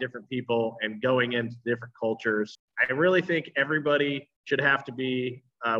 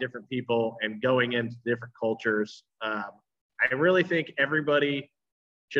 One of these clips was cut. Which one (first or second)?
first